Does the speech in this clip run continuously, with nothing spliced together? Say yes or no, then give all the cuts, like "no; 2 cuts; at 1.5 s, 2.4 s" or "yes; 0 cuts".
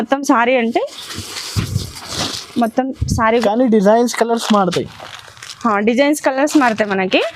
no; 1 cut; at 3.4 s